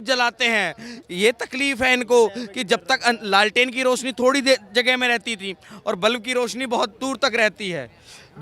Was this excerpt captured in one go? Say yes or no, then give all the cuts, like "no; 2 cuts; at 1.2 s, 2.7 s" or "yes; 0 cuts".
yes; 0 cuts